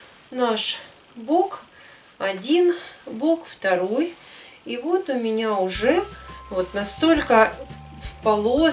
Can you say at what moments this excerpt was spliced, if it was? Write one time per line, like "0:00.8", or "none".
0:06.3